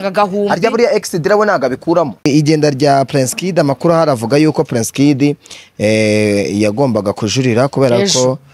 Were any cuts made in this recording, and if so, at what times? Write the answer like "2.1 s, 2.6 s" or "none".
2.2 s